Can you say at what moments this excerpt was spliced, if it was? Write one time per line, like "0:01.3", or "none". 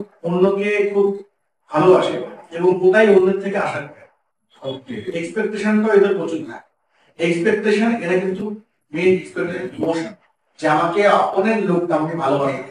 none